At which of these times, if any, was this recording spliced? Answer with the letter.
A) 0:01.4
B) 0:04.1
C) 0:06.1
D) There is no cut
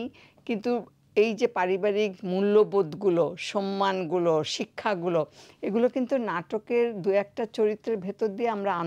D